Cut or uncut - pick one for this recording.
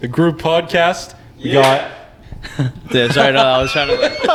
uncut